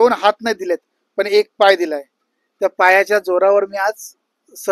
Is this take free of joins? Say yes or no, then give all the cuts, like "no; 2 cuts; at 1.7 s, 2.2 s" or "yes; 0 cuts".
yes; 0 cuts